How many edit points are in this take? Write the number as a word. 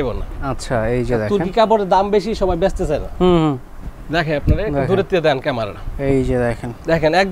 zero